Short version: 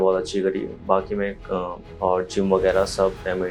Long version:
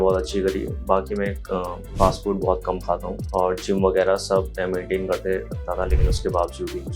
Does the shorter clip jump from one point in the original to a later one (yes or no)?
yes